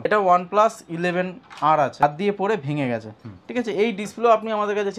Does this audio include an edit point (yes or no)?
yes